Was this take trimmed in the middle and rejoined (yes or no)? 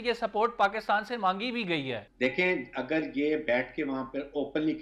yes